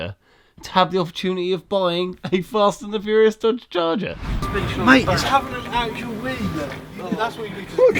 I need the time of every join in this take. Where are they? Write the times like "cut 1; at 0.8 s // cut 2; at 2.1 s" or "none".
cut 1; at 4.4 s